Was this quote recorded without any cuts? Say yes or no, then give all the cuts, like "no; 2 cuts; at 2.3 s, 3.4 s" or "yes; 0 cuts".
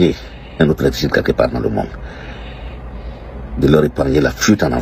yes; 0 cuts